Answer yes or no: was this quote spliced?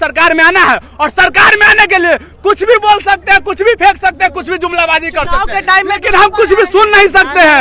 no